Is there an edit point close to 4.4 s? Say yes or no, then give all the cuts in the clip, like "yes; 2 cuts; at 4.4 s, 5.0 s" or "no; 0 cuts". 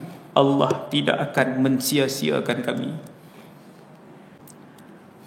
yes; 1 cut; at 4.4 s